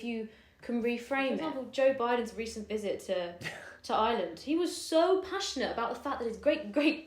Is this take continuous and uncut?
no; 1 cut; at 1.5 s

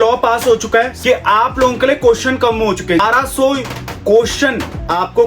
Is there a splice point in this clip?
yes; 2 cuts; at 0.9 s, 3.0 s

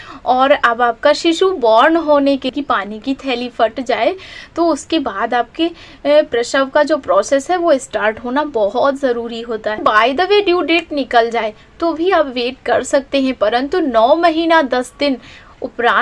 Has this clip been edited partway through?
yes; 2 cuts; at 2.5 s, 9.8 s

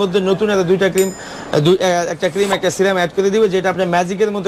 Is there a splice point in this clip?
no; 0 cuts

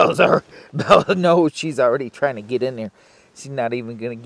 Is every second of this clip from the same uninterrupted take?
yes; 0 cuts

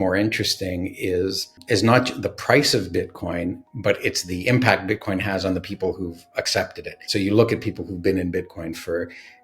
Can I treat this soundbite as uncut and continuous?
no; 2 cuts; at 1.6 s, 7.0 s

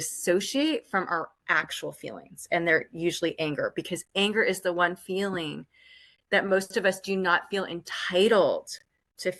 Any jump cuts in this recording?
no; 0 cuts

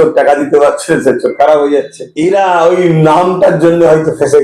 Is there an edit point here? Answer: yes; 1 cut; at 2.0 s

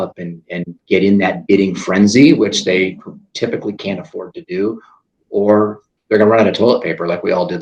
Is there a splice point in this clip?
no; 0 cuts

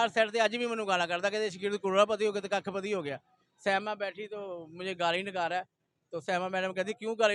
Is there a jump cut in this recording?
no; 0 cuts

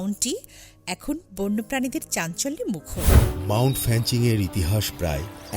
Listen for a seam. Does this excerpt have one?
yes; 1 cut; at 3.1 s

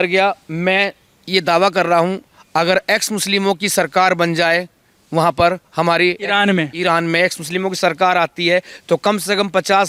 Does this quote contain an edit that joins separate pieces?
no; 0 cuts

